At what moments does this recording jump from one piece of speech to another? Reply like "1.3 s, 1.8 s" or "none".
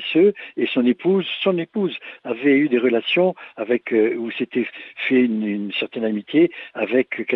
none